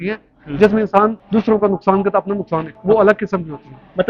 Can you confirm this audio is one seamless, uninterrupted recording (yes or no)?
no